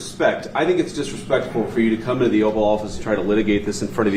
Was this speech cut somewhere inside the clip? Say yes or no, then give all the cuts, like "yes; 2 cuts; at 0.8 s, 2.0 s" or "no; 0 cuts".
no; 0 cuts